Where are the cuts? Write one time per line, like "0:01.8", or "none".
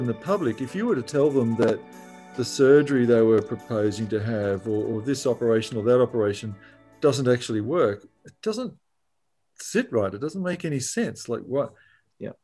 none